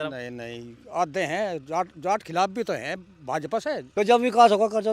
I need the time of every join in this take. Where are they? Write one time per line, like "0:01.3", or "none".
0:03.9